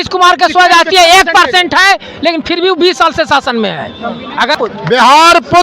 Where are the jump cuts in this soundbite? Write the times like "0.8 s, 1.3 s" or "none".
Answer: 4.6 s

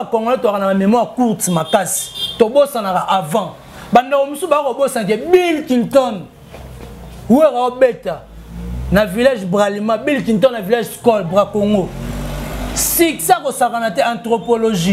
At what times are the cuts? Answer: none

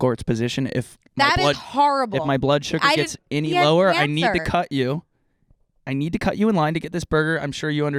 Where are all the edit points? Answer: none

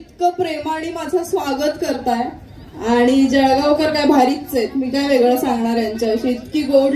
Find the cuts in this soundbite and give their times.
none

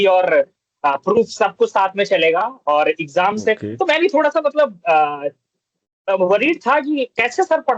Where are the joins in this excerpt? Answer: none

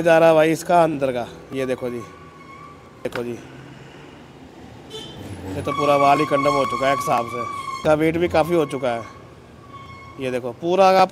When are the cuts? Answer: 3.1 s, 7.6 s

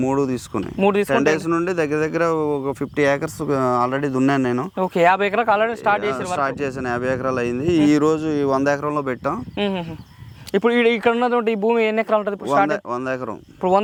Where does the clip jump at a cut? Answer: none

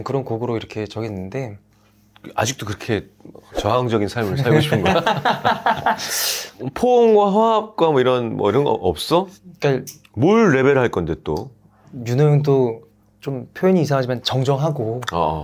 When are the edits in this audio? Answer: none

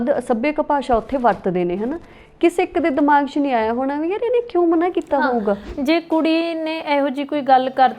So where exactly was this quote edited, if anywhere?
5.7 s

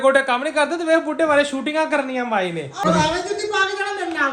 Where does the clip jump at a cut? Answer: 2.8 s

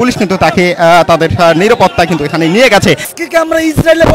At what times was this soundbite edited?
3.1 s

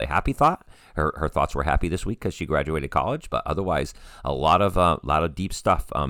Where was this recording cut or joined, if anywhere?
none

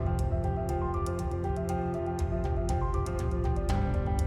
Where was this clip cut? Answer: none

